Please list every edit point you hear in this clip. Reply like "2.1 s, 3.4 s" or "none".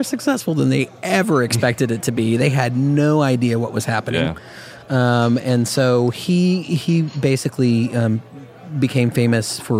none